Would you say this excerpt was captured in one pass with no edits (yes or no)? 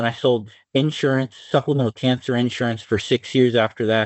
yes